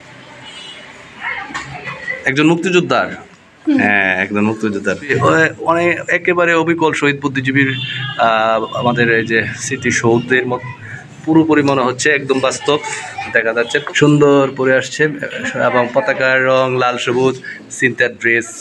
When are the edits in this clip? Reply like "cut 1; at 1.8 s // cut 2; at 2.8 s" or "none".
cut 1; at 5.1 s // cut 2; at 13.9 s